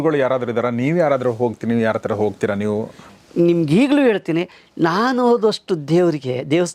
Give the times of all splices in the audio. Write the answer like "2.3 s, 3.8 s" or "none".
3.0 s